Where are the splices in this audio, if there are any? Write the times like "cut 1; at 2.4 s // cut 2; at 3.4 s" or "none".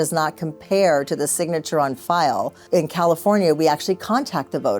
cut 1; at 2.6 s